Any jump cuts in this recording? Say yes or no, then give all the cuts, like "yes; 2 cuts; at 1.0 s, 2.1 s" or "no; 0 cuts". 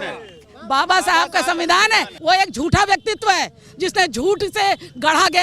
yes; 1 cut; at 2.1 s